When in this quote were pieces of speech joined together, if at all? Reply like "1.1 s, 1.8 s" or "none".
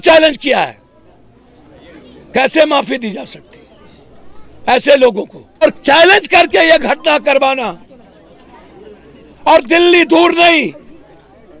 5.6 s